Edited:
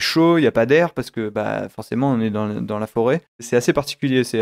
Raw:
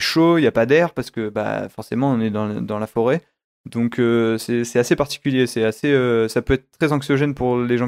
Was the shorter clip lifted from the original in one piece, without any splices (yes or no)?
no